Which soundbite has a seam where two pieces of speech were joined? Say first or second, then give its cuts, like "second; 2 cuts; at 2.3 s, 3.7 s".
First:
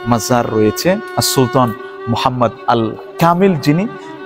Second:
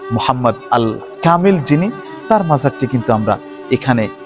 first; 1 cut; at 1.1 s